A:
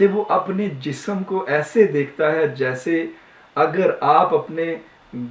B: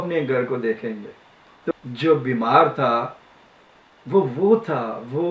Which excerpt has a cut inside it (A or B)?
B